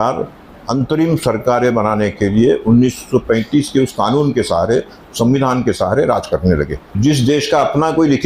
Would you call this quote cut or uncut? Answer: cut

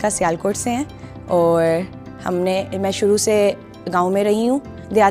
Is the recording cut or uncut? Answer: uncut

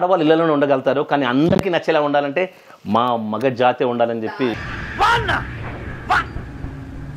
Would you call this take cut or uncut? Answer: cut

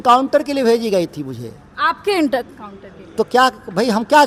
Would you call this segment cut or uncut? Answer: uncut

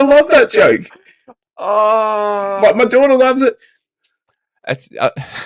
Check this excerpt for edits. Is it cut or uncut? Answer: uncut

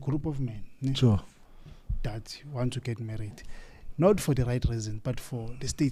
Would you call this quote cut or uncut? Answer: uncut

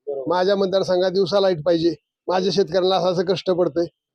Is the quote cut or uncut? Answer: uncut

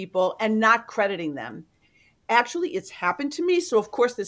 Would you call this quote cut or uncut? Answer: uncut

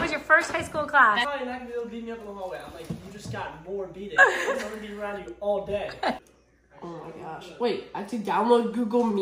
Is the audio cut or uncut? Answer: cut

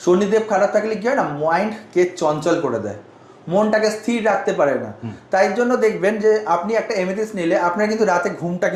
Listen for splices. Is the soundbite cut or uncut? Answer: uncut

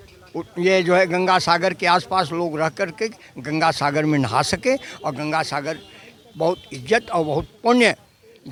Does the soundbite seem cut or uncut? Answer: uncut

